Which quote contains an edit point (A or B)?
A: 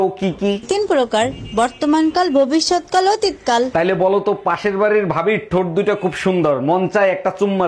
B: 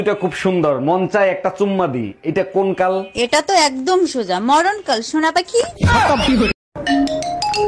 B